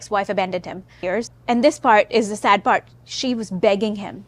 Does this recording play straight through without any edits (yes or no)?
no